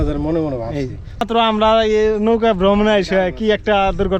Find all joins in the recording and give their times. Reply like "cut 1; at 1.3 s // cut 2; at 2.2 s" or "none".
cut 1; at 1.2 s